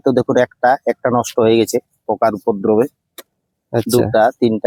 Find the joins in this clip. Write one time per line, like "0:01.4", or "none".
none